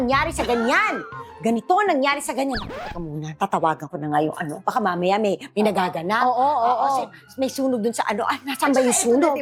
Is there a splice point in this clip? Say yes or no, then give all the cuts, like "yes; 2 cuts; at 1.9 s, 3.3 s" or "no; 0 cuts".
no; 0 cuts